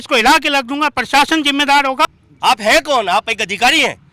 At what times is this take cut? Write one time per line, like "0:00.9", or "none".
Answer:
0:02.1